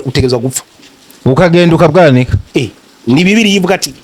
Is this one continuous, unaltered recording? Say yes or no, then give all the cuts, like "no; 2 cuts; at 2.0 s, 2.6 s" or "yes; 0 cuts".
yes; 0 cuts